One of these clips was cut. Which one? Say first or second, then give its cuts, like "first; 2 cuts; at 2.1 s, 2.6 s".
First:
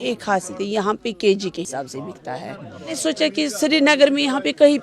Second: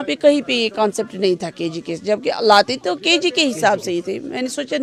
first; 2 cuts; at 1.7 s, 3.0 s